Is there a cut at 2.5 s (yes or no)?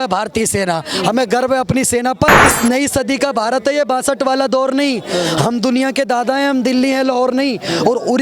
yes